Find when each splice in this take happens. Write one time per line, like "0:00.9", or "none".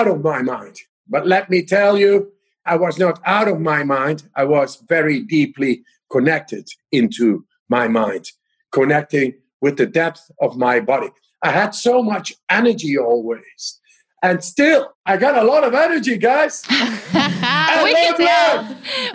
0:11.3
0:14.9